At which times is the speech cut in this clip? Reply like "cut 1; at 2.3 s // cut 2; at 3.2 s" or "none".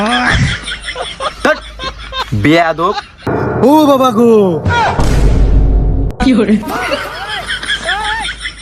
cut 1; at 3.3 s